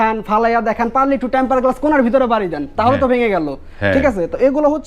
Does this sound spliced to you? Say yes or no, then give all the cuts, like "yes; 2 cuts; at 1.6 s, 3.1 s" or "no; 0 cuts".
no; 0 cuts